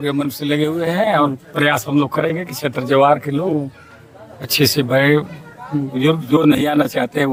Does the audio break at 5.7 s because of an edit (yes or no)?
no